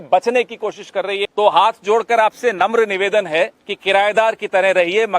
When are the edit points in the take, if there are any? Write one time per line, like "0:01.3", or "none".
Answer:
0:01.2
0:03.7